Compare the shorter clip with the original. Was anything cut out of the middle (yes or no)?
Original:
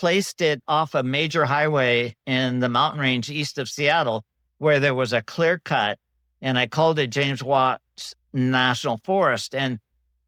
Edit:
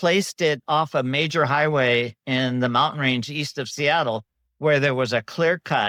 no